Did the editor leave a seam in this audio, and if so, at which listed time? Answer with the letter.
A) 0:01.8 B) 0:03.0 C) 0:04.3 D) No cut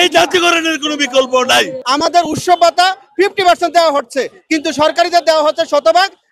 A